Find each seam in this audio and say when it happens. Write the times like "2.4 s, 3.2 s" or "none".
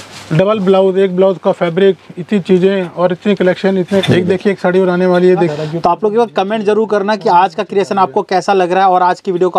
4.0 s, 5.5 s